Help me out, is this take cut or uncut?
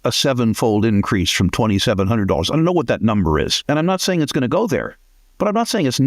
cut